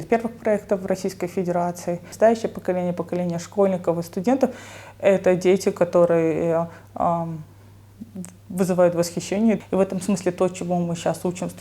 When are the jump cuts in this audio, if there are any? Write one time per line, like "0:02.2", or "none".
0:02.1
0:09.6